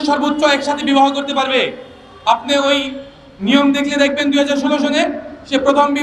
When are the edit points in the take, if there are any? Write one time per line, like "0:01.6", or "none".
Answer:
none